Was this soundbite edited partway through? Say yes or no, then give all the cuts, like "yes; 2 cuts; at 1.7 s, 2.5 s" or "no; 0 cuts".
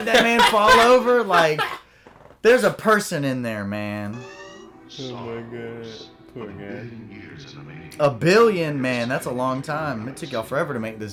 no; 0 cuts